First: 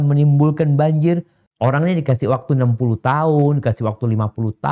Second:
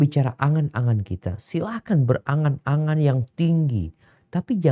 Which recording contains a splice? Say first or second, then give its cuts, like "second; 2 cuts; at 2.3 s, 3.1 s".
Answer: first; 1 cut; at 1.4 s